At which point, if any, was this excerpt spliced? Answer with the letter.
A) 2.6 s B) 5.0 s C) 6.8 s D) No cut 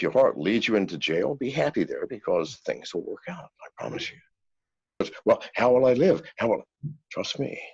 B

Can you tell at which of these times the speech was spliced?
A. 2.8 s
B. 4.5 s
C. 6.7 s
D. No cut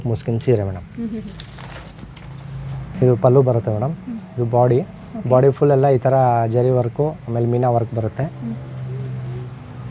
A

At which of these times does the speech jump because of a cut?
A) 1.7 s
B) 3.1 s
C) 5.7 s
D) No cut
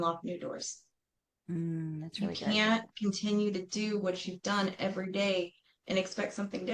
D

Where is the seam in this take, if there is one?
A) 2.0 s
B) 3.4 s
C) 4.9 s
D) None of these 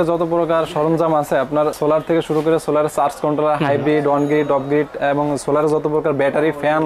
D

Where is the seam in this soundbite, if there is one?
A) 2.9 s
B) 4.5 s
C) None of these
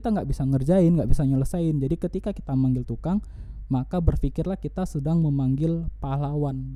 C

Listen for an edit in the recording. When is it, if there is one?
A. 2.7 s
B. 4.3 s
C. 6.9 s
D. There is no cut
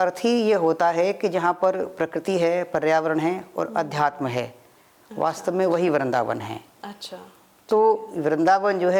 D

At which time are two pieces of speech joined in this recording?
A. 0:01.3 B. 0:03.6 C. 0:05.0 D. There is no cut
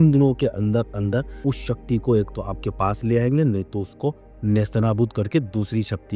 A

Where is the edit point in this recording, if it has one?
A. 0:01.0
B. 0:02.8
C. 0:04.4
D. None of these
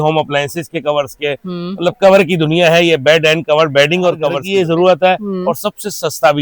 C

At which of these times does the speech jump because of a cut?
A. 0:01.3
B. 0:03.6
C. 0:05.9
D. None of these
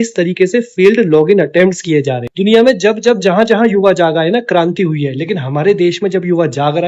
D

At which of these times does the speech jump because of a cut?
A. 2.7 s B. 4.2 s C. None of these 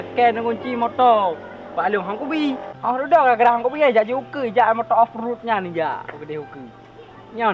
C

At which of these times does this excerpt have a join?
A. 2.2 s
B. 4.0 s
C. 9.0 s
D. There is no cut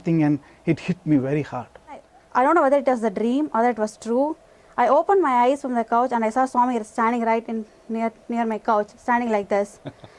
A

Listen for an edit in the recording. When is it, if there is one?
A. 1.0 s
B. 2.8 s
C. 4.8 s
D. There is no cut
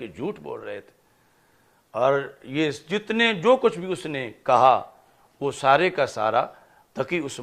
D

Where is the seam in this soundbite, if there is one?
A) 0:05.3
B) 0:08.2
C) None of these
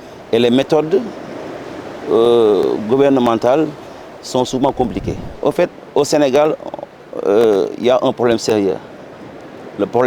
A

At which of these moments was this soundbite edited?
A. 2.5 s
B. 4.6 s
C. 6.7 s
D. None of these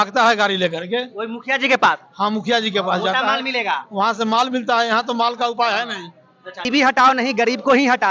C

